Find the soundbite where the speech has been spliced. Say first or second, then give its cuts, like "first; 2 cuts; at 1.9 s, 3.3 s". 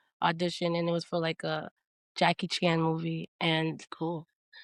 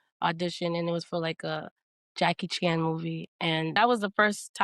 second; 1 cut; at 3.7 s